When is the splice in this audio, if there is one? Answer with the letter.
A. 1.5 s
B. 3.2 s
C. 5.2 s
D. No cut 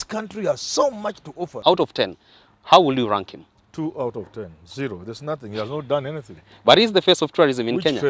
A